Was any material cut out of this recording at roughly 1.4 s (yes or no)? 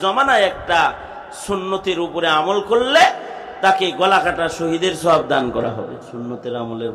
no